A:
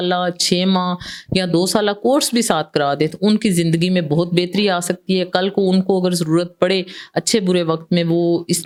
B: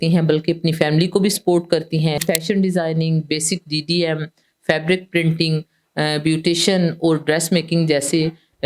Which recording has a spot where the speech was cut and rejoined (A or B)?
B